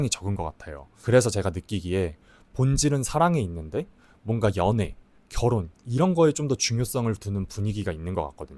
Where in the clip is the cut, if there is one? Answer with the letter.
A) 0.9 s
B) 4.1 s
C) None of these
C